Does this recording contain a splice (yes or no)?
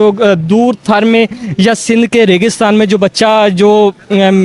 no